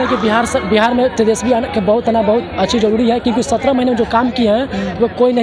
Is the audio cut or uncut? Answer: uncut